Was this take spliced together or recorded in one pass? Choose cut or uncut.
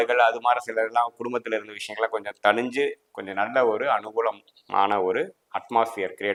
uncut